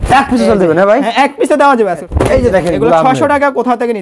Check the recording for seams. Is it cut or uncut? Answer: cut